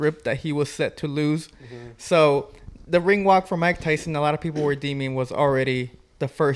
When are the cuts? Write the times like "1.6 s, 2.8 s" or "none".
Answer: none